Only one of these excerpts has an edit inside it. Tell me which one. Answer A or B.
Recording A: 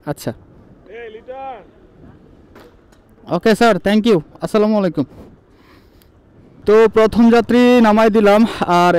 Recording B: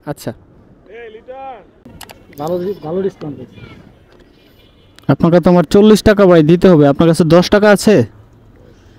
B